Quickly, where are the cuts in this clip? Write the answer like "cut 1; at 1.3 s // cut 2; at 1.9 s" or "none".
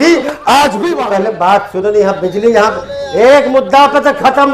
cut 1; at 1.0 s